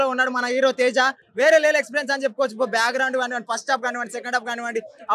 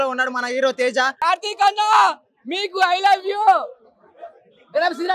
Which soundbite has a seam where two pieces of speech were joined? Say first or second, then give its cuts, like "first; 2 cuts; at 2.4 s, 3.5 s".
second; 1 cut; at 1.1 s